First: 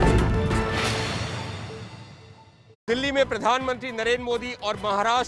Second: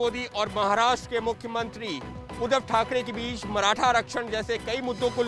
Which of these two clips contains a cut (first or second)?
first